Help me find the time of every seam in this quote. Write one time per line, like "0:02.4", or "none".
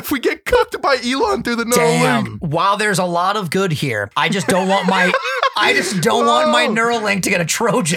0:02.4
0:04.1